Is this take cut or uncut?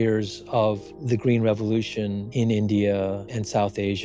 cut